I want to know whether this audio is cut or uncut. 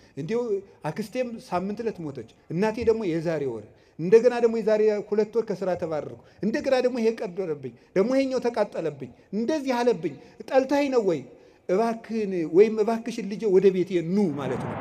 uncut